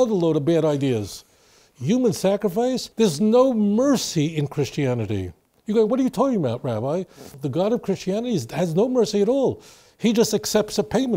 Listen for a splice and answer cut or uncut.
cut